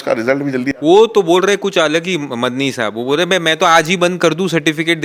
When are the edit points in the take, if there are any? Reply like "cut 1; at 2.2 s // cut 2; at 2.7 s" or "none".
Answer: none